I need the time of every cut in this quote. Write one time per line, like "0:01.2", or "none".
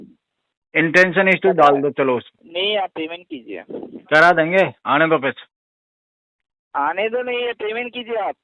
0:02.4